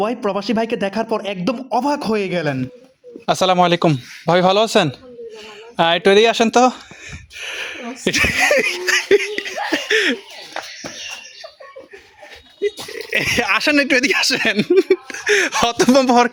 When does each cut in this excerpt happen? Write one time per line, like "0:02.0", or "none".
none